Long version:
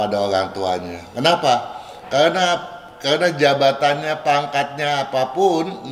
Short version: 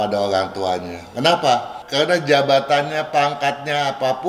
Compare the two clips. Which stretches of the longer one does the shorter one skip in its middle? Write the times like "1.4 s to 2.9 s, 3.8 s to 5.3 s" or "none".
1.8 s to 2.9 s